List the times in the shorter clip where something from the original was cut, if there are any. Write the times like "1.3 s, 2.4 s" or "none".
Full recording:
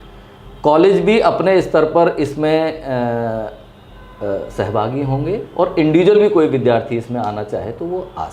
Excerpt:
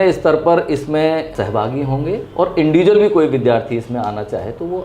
1.3 s